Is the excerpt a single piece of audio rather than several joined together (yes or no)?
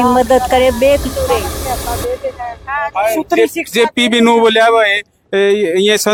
yes